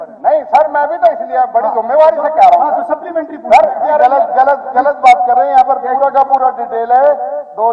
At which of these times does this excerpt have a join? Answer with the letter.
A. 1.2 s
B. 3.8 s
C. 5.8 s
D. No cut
B